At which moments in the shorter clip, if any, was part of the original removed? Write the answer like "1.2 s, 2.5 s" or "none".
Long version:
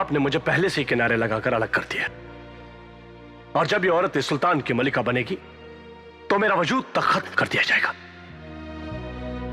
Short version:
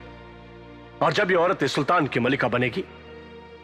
none